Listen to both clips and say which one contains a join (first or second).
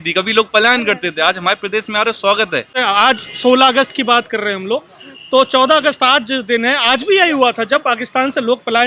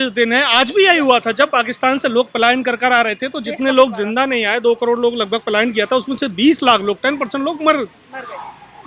first